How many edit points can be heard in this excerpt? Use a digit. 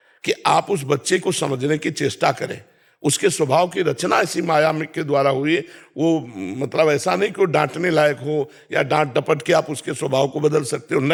0